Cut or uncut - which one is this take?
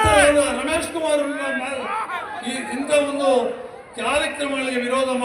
cut